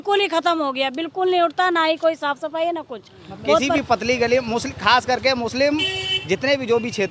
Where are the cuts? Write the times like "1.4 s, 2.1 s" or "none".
3.8 s